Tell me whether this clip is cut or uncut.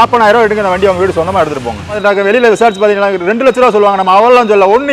cut